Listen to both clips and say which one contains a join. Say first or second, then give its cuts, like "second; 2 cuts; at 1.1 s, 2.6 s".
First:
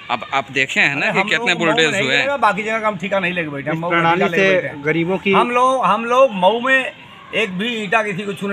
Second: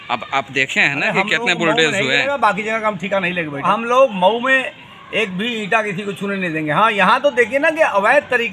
second; 1 cut; at 3.6 s